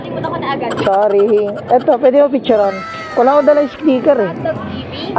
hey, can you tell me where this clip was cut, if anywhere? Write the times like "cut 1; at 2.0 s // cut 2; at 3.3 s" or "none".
none